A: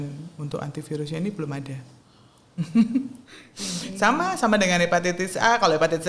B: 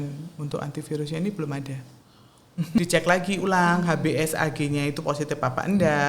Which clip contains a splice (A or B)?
B